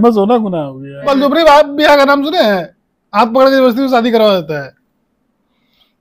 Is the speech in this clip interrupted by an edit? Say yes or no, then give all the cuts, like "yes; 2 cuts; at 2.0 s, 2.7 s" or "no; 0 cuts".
yes; 1 cut; at 0.9 s